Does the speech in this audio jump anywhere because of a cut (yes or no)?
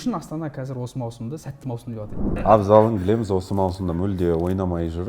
yes